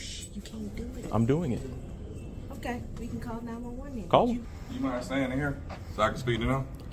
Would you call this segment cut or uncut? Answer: cut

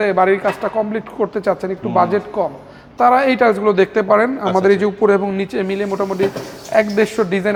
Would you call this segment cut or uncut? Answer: uncut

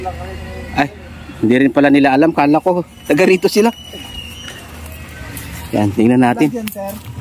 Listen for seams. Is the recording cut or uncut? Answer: uncut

